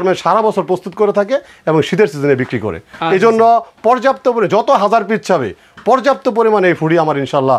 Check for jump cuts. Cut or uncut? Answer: uncut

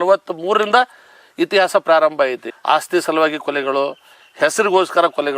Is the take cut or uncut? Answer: uncut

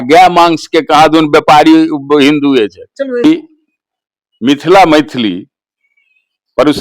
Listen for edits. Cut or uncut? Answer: cut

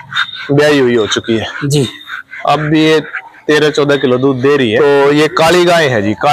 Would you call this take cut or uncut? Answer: cut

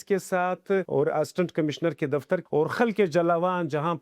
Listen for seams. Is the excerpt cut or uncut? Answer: cut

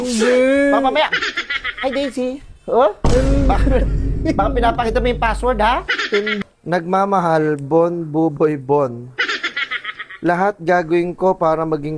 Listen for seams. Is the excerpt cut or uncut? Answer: cut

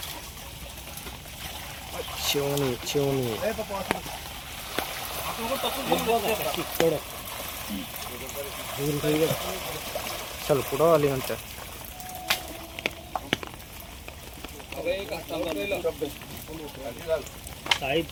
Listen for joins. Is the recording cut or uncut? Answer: uncut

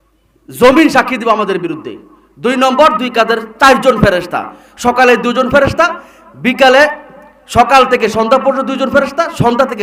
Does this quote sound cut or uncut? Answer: uncut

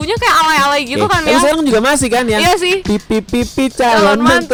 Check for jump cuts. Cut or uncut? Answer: uncut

